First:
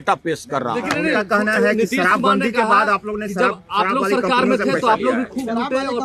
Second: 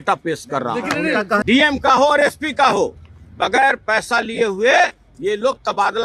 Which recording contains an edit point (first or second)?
second